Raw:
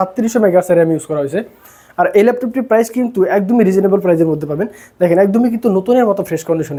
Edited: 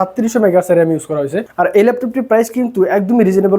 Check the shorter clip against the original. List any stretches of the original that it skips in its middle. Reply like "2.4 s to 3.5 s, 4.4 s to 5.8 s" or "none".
1.4 s to 1.8 s